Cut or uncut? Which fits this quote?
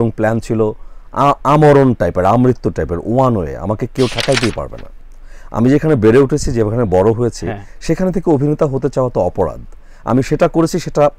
uncut